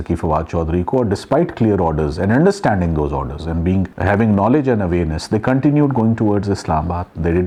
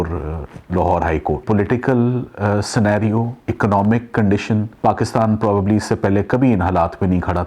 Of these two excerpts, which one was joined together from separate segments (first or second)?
second